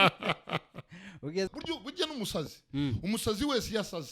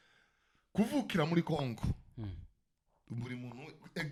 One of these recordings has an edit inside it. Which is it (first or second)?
first